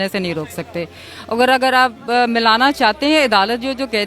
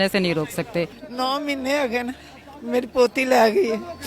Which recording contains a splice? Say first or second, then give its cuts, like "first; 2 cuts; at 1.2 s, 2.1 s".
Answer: second; 1 cut; at 1.0 s